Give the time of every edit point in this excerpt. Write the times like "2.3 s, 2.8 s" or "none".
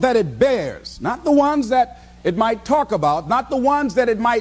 none